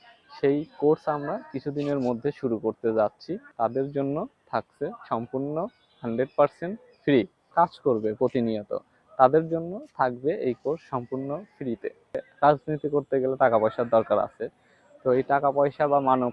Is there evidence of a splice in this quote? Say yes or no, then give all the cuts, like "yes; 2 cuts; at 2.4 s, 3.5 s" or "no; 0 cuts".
yes; 3 cuts; at 3.4 s, 7.5 s, 12.3 s